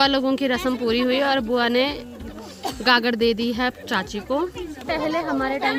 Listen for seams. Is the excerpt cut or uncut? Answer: uncut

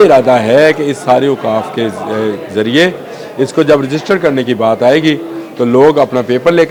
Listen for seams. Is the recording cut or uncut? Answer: uncut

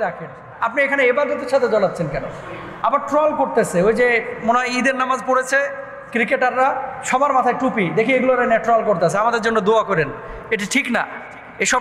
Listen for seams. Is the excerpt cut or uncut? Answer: uncut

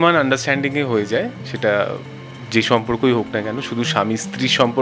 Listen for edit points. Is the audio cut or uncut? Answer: uncut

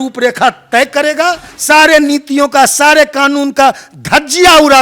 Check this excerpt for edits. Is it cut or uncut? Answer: cut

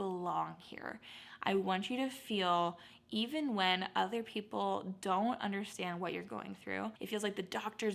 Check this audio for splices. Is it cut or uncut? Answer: cut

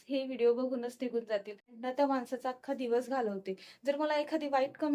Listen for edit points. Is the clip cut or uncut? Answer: cut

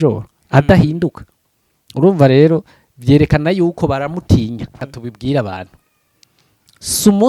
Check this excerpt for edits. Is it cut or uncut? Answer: cut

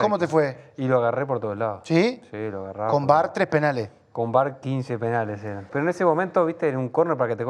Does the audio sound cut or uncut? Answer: cut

